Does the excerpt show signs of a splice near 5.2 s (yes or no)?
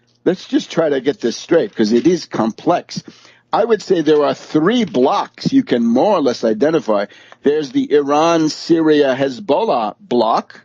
yes